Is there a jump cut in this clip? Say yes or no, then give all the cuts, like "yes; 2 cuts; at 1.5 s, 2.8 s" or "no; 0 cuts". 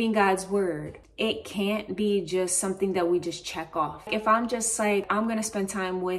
yes; 3 cuts; at 0.9 s, 4.1 s, 5.1 s